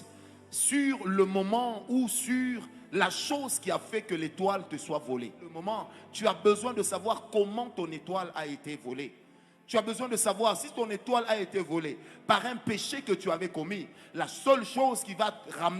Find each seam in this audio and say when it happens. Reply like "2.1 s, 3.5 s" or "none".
5.6 s